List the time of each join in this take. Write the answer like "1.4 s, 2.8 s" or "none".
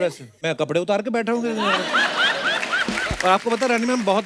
3.0 s